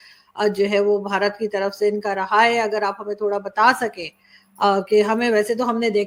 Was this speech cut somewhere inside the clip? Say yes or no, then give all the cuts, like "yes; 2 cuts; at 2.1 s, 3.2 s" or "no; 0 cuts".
no; 0 cuts